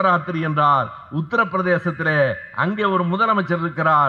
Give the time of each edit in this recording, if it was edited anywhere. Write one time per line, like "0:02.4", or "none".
none